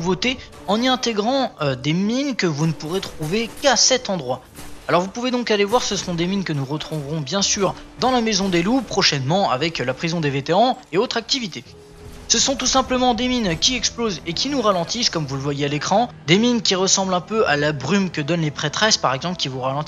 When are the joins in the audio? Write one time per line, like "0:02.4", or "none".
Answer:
0:05.7